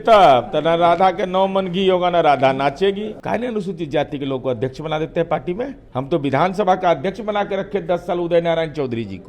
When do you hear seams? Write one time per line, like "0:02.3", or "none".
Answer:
0:03.2
0:05.8